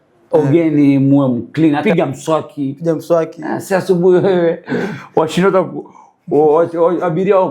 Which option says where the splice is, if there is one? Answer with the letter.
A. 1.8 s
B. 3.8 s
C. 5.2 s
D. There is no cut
A